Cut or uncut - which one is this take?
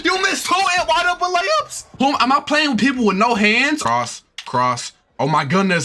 cut